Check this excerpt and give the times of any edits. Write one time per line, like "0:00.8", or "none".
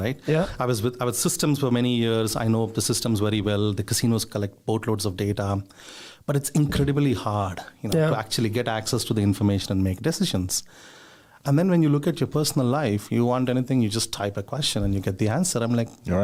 none